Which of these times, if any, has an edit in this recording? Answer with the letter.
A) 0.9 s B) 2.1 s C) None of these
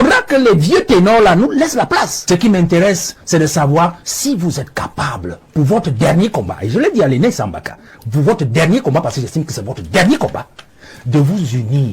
B